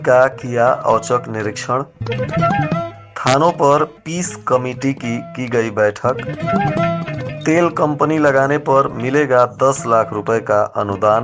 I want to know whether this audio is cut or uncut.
uncut